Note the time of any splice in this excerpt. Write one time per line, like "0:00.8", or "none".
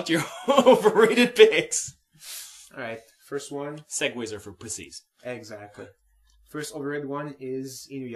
0:06.9